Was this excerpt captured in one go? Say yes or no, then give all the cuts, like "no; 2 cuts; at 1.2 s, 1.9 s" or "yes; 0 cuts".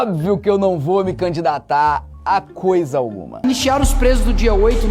no; 1 cut; at 3.4 s